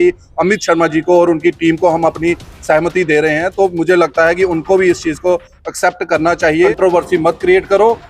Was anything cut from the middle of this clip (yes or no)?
yes